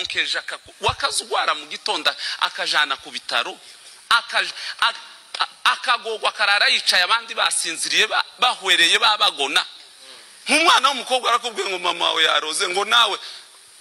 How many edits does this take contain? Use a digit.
0